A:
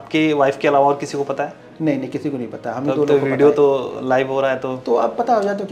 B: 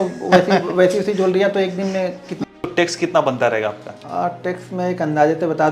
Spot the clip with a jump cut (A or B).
B